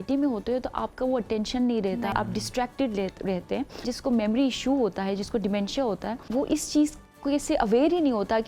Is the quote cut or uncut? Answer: cut